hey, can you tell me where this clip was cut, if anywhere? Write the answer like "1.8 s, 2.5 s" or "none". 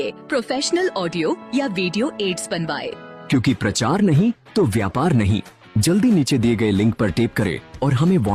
none